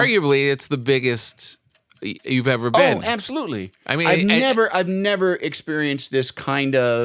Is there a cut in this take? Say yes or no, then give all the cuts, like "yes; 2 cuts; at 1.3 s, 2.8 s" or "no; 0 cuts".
no; 0 cuts